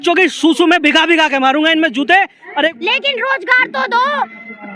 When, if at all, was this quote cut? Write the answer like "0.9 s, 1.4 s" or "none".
2.7 s